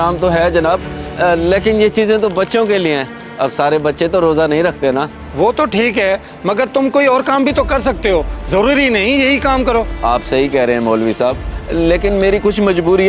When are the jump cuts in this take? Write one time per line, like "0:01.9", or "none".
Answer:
none